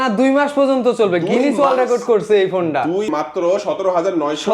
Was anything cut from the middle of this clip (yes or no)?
yes